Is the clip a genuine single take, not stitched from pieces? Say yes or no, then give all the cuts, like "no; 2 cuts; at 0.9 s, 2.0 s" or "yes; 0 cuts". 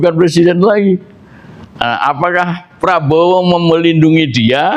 yes; 0 cuts